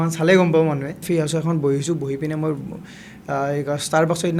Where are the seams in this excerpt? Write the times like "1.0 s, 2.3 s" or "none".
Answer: 1.0 s